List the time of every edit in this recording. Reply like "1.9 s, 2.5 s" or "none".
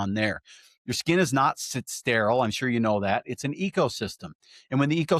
none